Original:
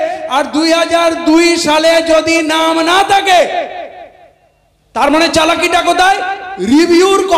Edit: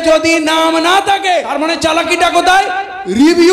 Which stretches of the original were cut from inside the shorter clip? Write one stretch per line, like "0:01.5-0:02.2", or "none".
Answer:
0:03.5-0:05.0

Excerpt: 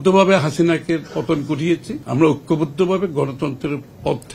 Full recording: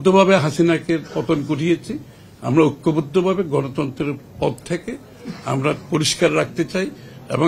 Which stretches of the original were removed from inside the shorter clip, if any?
0:02.0-0:02.3

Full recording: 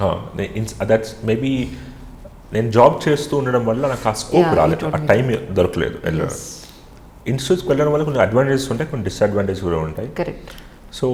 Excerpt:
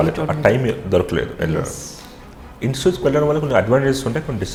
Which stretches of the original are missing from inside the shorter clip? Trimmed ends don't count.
none

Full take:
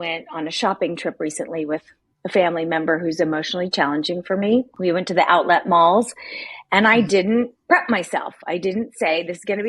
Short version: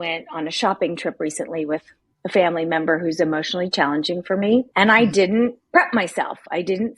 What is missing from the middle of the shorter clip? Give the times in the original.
0:04.7-0:06.7

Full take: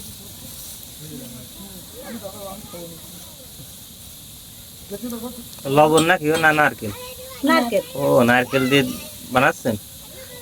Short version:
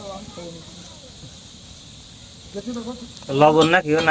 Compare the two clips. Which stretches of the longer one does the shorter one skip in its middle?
none

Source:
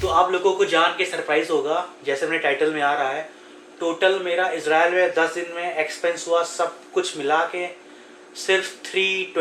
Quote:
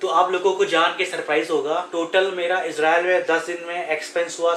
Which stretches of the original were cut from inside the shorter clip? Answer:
0:01.9-0:03.7

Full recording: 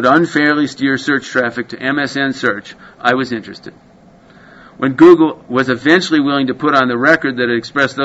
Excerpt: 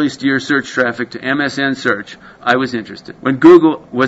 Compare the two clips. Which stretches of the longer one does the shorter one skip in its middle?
0:03.6-0:04.6

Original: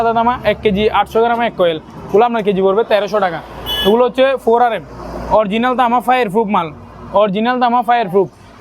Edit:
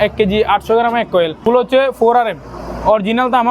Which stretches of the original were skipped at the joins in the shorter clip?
0:01.9-0:03.9

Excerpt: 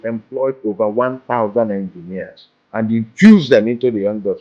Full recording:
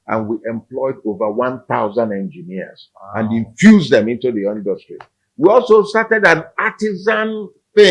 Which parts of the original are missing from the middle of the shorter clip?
none

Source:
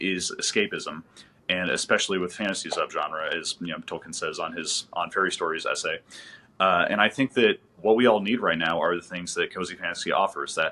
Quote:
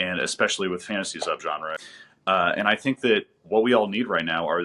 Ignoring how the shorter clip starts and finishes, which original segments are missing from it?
0:03.2-0:06.1

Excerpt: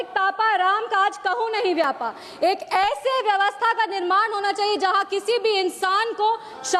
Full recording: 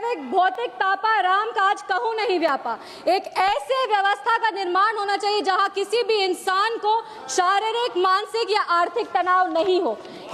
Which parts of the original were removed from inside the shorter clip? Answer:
none

